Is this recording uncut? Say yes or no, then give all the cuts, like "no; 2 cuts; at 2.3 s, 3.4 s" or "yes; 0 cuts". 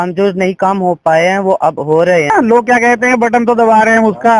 no; 1 cut; at 2.3 s